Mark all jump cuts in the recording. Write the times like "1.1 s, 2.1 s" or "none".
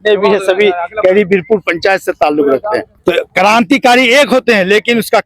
2.9 s